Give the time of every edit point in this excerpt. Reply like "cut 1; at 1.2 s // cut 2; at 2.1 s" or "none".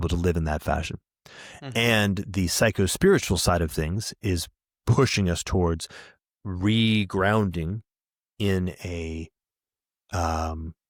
none